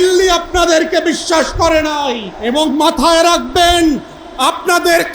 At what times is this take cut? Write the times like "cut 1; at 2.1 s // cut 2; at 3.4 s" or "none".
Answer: cut 1; at 2.3 s